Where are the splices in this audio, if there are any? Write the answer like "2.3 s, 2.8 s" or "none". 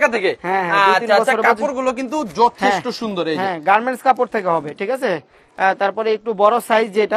none